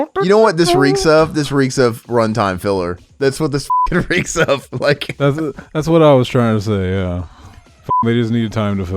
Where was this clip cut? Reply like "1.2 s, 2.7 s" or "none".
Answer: 5.1 s

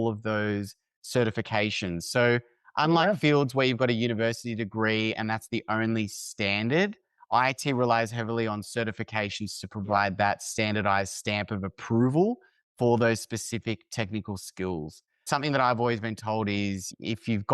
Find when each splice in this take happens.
15.2 s

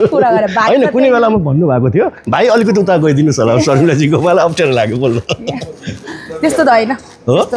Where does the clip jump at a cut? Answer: none

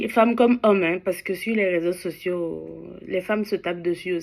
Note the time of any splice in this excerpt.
none

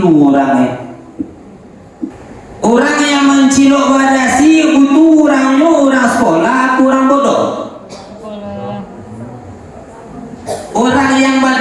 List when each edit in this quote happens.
2.2 s

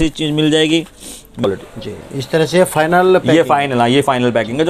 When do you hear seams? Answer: 1.4 s

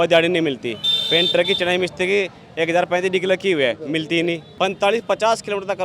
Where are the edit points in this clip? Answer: 4.5 s

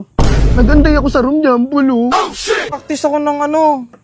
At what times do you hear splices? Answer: 2.8 s

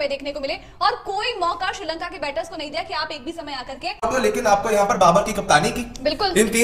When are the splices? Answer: 4.0 s

